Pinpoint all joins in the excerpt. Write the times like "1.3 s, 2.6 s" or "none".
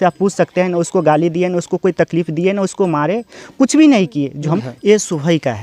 4.6 s